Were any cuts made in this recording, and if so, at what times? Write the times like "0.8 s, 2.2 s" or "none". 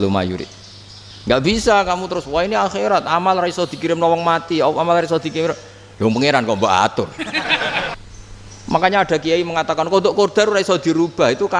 8.0 s